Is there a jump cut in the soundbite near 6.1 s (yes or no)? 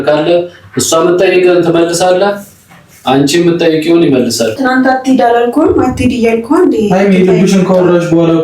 no